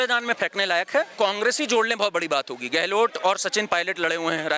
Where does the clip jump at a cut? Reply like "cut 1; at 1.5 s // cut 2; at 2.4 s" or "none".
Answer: cut 1; at 1.1 s